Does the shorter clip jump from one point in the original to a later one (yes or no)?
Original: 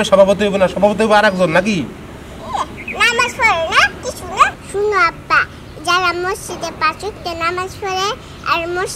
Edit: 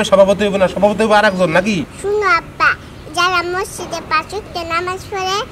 yes